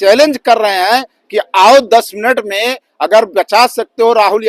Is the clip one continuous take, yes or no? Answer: yes